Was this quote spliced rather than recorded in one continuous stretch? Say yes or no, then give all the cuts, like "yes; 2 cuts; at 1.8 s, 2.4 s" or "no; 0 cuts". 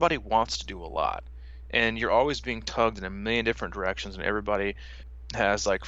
yes; 1 cut; at 4.9 s